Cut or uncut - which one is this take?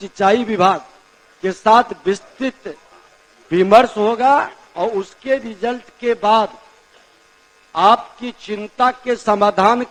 uncut